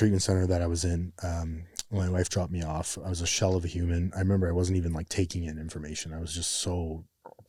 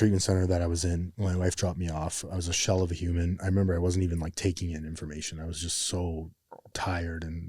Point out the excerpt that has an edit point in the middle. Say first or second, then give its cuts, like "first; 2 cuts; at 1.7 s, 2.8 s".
second; 1 cut; at 1.1 s